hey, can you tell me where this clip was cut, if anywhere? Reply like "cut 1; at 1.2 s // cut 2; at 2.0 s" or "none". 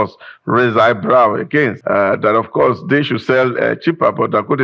cut 1; at 1.8 s